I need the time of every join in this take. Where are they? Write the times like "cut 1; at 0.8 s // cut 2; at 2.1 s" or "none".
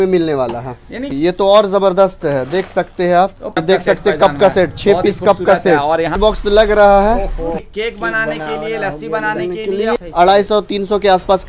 cut 1; at 1.1 s // cut 2; at 3.5 s // cut 3; at 6.1 s // cut 4; at 7.6 s // cut 5; at 10.0 s